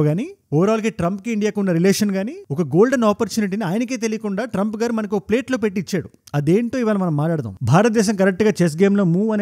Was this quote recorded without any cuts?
no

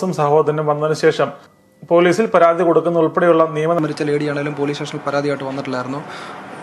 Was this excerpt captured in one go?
no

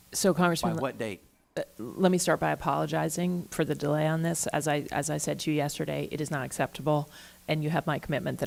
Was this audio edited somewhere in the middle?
no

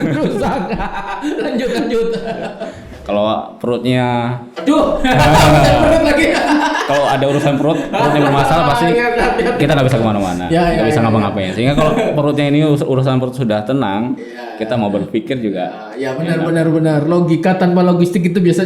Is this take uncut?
no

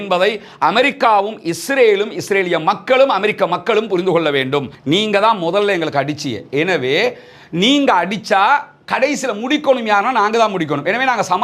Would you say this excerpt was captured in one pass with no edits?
no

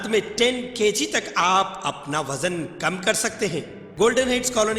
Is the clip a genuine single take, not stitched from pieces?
no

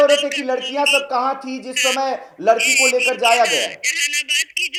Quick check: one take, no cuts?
yes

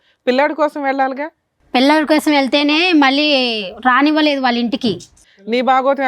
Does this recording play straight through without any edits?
no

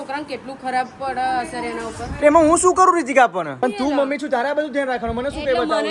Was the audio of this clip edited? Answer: yes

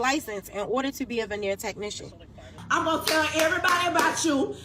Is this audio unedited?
no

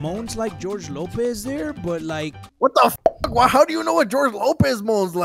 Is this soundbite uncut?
yes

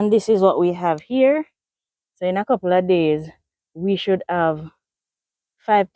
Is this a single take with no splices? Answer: yes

